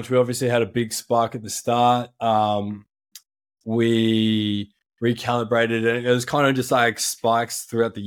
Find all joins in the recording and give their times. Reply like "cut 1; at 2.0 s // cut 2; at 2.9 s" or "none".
none